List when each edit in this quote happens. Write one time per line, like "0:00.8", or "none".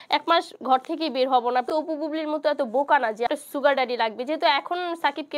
0:01.7
0:03.3